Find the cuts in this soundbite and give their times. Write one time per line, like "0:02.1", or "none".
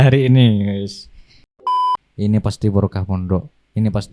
0:01.5